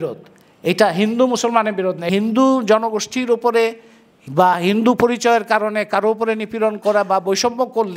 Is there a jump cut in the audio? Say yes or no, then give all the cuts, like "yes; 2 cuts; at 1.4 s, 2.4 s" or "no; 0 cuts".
yes; 1 cut; at 2.0 s